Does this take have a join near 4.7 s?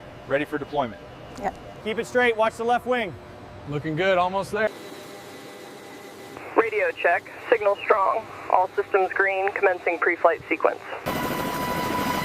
yes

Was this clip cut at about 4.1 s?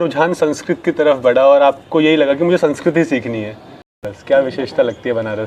yes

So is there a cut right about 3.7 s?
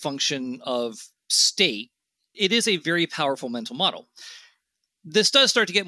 no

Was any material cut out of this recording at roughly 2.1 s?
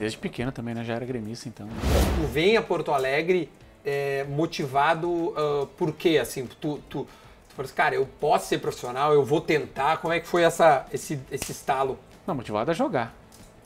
yes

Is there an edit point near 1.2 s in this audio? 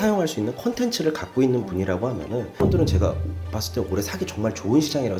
no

